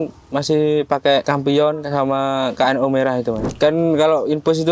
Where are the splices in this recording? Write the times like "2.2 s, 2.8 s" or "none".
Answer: 1.2 s, 3.4 s